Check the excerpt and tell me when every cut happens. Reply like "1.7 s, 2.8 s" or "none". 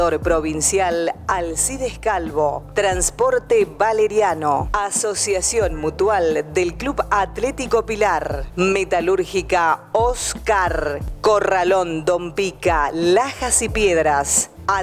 none